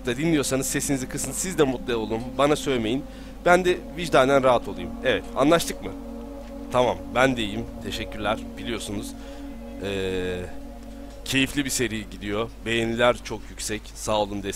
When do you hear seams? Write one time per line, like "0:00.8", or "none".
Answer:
0:09.5